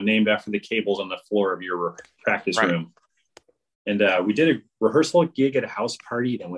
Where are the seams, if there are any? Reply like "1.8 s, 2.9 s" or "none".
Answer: none